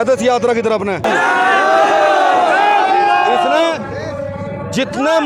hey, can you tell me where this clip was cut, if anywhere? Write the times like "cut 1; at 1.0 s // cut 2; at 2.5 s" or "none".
none